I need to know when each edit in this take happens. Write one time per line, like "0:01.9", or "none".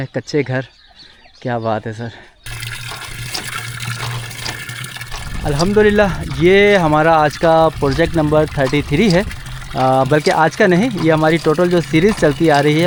none